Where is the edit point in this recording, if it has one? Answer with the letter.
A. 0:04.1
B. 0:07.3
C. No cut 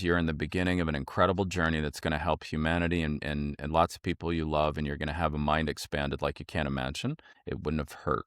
B